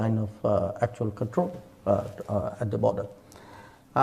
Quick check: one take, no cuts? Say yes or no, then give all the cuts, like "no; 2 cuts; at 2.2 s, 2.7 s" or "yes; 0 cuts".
yes; 0 cuts